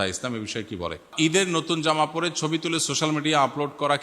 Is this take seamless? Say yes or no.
no